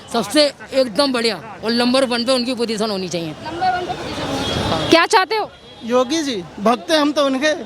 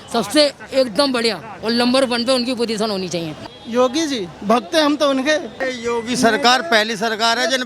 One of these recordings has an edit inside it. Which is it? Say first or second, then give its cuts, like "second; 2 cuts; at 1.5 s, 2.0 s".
second; 2 cuts; at 3.4 s, 5.7 s